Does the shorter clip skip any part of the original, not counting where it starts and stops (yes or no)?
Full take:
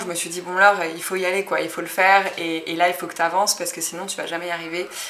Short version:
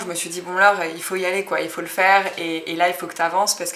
no